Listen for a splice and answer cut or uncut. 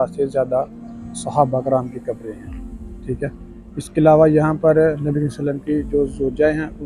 uncut